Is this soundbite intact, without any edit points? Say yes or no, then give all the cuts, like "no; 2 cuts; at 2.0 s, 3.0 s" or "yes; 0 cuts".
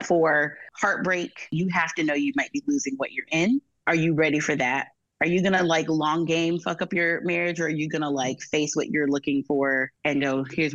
no; 2 cuts; at 1.5 s, 4.9 s